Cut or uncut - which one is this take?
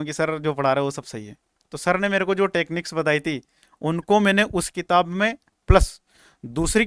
cut